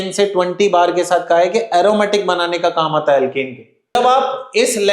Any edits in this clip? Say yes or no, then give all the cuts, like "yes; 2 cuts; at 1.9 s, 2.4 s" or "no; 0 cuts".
yes; 1 cut; at 4.0 s